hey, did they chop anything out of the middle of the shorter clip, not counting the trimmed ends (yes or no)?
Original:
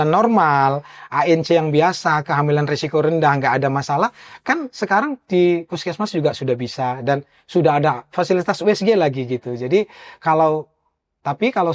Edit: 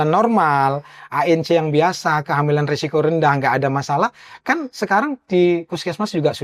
no